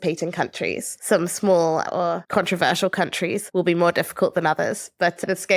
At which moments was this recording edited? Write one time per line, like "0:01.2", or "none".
0:00.9
0:02.2
0:03.4